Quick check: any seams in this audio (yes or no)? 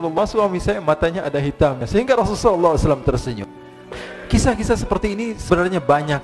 yes